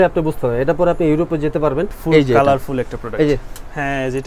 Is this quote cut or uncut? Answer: cut